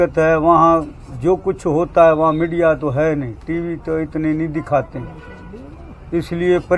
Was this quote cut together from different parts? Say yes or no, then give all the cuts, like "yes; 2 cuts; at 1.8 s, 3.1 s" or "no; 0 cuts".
no; 0 cuts